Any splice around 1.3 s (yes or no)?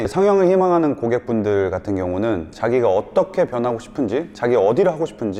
no